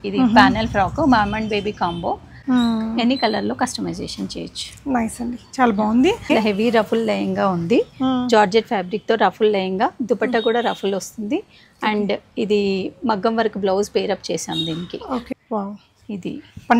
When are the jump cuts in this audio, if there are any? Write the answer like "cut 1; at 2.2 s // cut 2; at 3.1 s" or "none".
cut 1; at 2.3 s // cut 2; at 6.3 s // cut 3; at 15.3 s